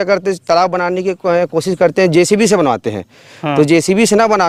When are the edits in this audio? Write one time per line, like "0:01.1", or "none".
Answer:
none